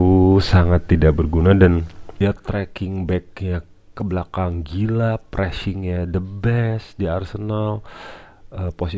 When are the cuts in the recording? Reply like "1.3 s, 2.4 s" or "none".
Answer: 2.2 s